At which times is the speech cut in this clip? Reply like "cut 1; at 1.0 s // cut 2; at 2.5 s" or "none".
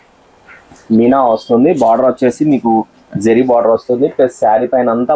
none